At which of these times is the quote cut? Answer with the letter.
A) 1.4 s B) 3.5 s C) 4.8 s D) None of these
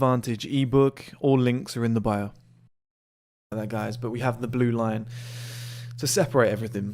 B